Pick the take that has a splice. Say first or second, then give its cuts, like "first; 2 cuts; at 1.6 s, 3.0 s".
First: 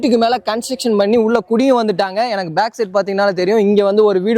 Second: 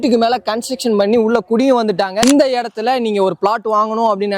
second; 1 cut; at 2.2 s